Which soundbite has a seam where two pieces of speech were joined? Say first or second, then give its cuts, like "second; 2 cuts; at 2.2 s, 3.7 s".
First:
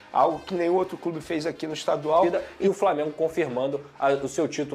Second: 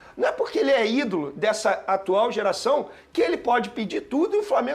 first; 1 cut; at 2.5 s